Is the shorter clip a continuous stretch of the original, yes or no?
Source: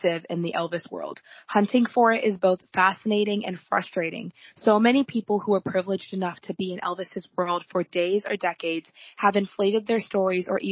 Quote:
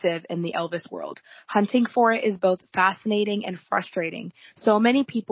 yes